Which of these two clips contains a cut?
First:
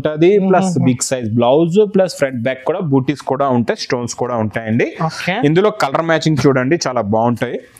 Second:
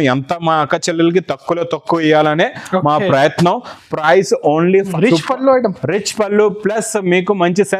second; 1 cut; at 4.9 s

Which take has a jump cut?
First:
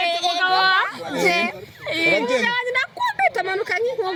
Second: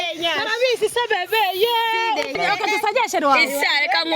second; 1 cut; at 2.3 s

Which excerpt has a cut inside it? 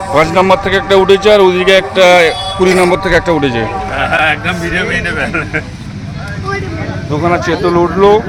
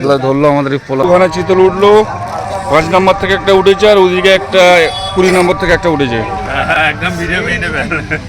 second; 1 cut; at 1.1 s

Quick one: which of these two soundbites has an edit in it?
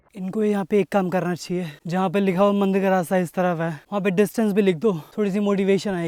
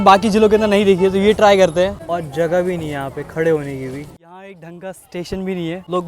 second; 2 cuts; at 2.0 s, 4.2 s

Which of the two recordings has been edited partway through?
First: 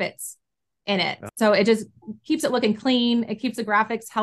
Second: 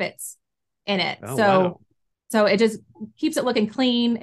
first; 1 cut; at 1.2 s

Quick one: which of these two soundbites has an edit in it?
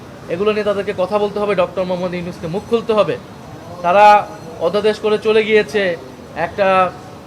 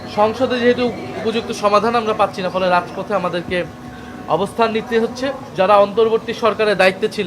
second; 1 cut; at 5.4 s

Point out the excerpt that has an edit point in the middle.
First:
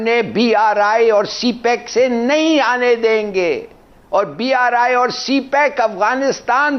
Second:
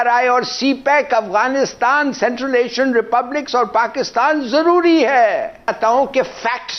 second; 1 cut; at 5.7 s

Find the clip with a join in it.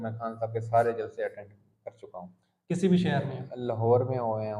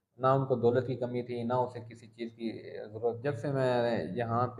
second; 1 cut; at 3.2 s

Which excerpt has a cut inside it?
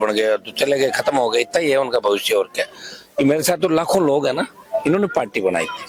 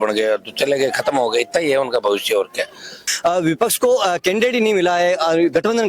second; 1 cut; at 3.0 s

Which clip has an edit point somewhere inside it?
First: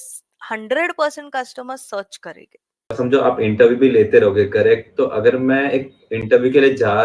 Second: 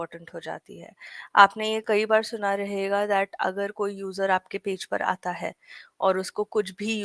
first; 1 cut; at 2.9 s

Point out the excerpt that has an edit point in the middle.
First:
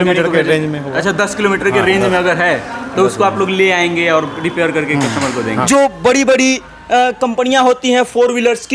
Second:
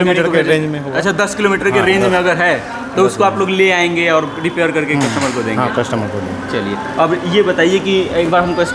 first; 1 cut; at 5.6 s

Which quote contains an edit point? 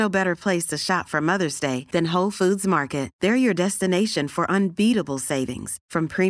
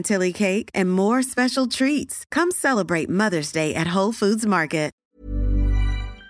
second; 1 cut; at 5.0 s

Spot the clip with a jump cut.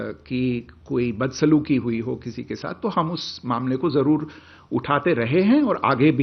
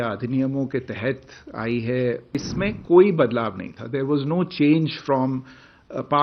second; 1 cut; at 2.3 s

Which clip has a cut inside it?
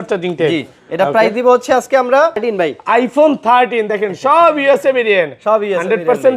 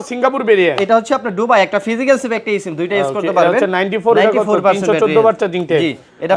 first; 1 cut; at 2.4 s

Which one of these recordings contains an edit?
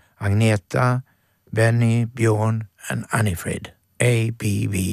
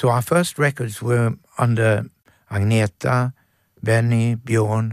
first; 1 cut; at 3.8 s

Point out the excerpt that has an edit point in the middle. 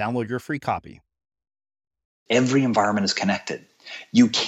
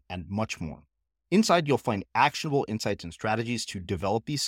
first; 1 cut; at 2.2 s

